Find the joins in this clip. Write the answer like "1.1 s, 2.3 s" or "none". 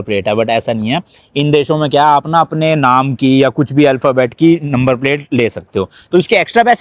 none